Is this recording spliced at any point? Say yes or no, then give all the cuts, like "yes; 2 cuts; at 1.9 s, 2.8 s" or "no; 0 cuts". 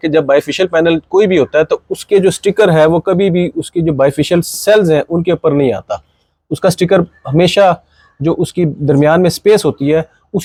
no; 0 cuts